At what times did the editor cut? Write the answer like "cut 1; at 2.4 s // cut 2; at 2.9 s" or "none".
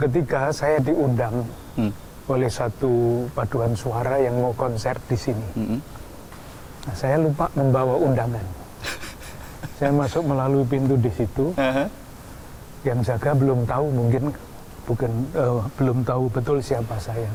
none